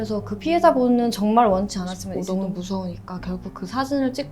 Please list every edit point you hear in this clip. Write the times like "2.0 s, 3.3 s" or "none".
2.1 s